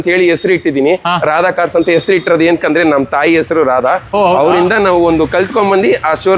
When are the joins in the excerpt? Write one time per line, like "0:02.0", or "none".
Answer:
none